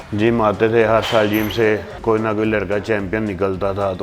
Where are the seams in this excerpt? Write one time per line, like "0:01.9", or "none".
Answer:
0:01.9